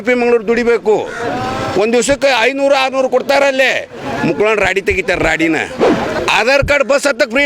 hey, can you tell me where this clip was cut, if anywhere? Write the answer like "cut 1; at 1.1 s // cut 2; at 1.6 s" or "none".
cut 1; at 6.2 s